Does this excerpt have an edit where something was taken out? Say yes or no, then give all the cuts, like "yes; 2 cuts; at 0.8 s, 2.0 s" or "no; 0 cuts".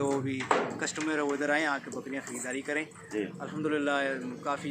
no; 0 cuts